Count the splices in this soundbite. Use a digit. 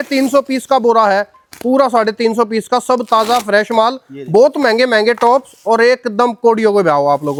0